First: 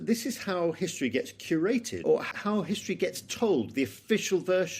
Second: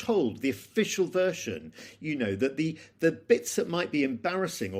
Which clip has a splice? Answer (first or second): first